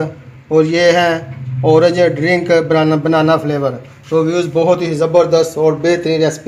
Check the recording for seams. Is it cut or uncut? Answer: uncut